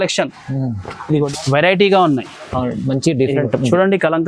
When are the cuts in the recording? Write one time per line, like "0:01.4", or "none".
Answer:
0:01.3